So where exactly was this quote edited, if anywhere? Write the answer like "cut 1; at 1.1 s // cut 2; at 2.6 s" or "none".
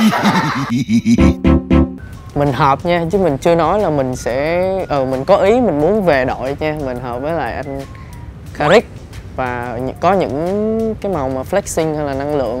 cut 1; at 2.0 s